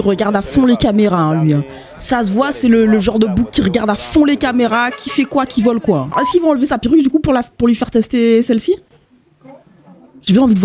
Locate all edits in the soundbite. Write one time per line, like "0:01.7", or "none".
0:06.2